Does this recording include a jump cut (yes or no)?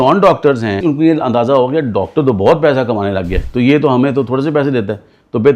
yes